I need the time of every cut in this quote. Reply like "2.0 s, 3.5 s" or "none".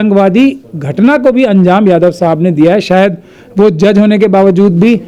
none